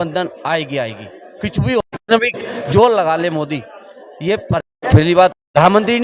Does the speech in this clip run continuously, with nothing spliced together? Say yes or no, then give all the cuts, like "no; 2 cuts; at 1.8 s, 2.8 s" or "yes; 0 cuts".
yes; 0 cuts